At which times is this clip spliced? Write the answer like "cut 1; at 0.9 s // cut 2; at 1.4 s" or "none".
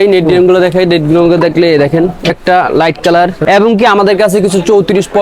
cut 1; at 2.3 s // cut 2; at 3.4 s